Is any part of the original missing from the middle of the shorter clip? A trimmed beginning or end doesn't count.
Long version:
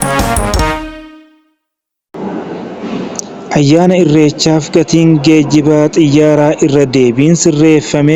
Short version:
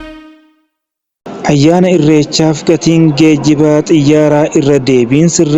yes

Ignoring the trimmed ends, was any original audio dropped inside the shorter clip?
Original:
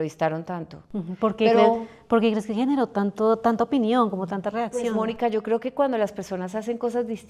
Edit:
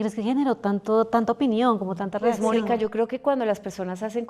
yes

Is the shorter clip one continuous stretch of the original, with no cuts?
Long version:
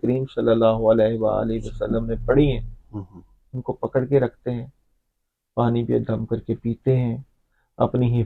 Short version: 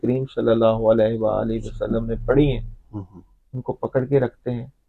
yes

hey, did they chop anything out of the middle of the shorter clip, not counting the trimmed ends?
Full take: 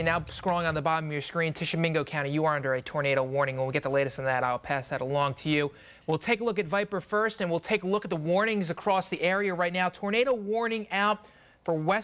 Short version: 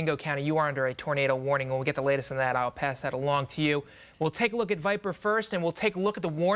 no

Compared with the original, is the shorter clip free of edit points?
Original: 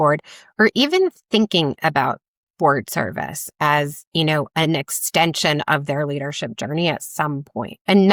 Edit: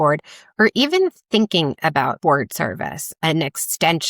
no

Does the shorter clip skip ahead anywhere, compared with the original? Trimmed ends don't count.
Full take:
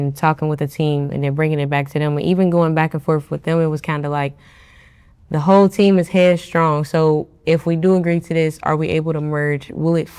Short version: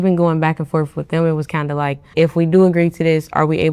yes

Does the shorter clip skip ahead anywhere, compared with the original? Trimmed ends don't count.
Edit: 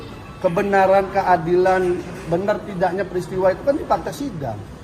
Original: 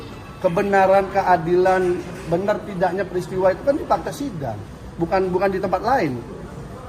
no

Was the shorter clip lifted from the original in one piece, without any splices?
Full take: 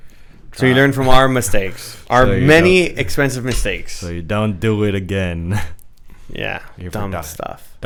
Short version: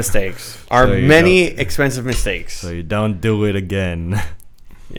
yes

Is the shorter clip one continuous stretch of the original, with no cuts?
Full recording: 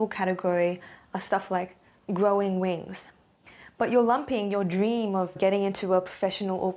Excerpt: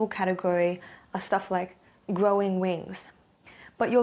yes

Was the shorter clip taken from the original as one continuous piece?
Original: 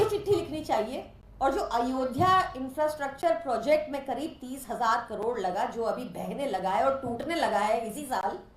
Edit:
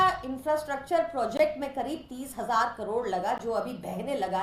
yes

